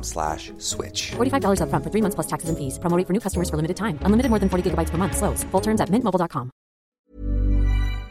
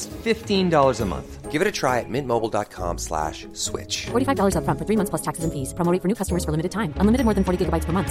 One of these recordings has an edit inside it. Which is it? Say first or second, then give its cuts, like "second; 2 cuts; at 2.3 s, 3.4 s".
first; 1 cut; at 6.8 s